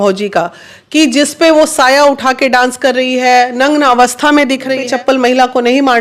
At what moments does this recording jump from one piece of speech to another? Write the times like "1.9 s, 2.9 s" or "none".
4.8 s